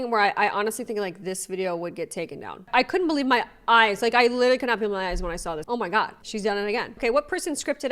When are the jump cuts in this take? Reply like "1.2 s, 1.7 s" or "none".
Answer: 2.6 s, 5.6 s, 6.9 s